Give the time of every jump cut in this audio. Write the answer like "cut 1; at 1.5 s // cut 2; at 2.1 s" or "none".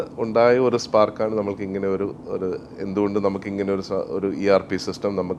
none